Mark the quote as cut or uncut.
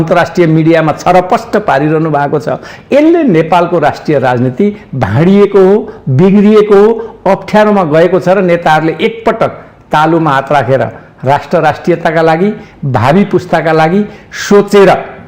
uncut